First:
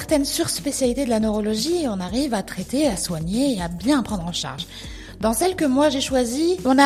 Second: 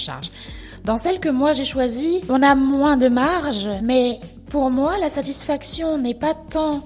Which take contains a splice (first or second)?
second